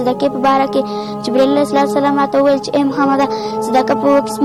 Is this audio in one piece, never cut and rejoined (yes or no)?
yes